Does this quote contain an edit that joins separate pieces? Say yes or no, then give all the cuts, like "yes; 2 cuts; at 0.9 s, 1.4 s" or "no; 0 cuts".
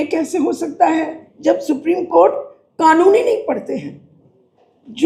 yes; 1 cut; at 1.2 s